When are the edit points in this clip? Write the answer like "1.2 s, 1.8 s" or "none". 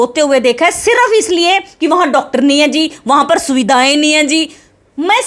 none